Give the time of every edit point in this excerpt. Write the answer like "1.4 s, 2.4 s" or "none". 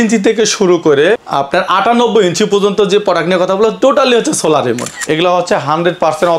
1.3 s, 4.9 s